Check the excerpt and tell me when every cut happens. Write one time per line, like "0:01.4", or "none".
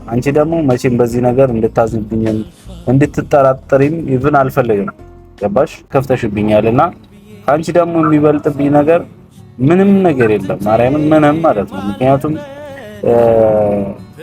0:05.9